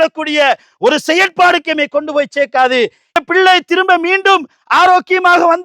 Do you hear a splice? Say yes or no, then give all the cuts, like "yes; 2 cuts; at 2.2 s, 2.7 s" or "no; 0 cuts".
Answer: yes; 1 cut; at 3.1 s